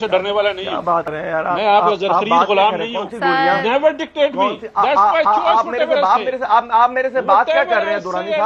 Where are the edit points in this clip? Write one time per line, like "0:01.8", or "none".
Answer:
0:01.1